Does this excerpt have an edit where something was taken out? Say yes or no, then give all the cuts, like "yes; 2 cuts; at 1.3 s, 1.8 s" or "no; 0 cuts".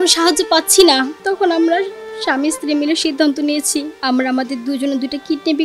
yes; 2 cuts; at 1.1 s, 3.9 s